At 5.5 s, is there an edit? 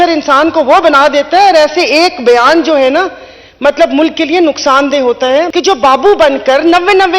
yes; 1 cut; at 5.5 s

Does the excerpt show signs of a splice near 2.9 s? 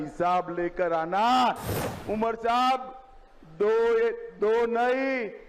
no; 1 cut; at 1.7 s

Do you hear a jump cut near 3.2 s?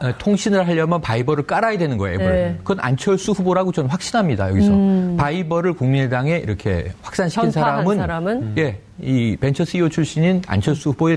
yes; 1 cut; at 3.2 s

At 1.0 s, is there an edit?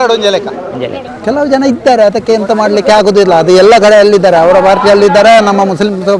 yes; 1 cut; at 1.0 s

